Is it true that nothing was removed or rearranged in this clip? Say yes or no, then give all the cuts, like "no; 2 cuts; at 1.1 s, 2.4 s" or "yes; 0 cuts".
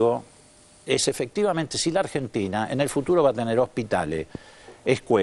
yes; 0 cuts